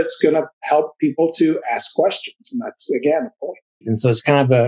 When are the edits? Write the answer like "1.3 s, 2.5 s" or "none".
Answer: 3.8 s